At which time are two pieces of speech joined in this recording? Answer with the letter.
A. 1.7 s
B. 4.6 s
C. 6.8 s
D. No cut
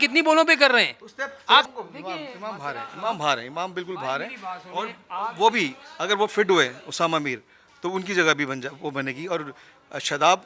A